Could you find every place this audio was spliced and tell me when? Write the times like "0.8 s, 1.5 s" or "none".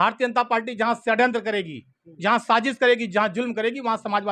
none